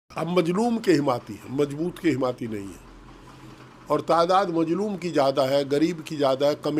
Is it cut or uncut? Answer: uncut